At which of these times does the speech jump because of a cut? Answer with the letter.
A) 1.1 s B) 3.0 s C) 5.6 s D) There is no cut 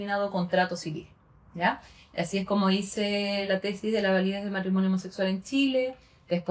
D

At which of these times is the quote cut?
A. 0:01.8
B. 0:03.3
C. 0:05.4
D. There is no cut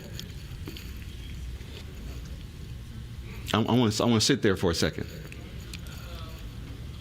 A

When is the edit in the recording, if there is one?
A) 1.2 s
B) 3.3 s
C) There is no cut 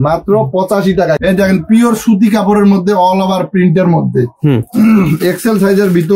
A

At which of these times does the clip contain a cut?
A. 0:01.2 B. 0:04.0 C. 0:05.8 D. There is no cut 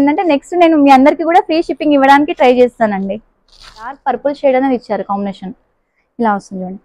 B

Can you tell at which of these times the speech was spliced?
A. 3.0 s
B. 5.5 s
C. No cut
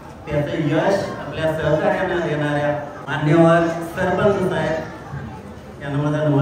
A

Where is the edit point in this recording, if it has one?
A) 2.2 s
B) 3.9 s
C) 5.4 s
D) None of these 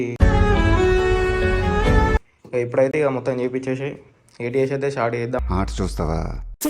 A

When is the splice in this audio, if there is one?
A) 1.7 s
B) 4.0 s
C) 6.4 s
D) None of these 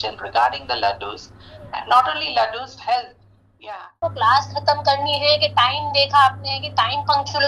B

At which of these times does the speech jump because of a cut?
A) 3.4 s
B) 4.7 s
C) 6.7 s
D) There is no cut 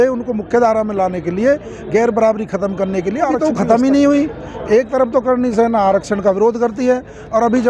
A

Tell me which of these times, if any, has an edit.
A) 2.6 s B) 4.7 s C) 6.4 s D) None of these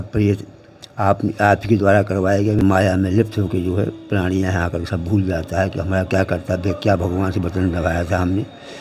A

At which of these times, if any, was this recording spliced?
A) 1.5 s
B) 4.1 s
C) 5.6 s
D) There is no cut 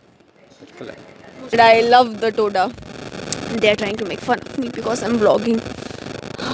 A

